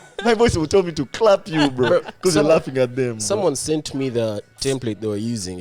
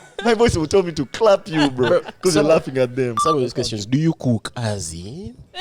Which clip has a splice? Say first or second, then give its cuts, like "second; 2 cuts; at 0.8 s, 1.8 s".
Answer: second; 1 cut; at 3.2 s